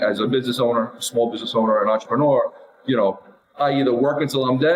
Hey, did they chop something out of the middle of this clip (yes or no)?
no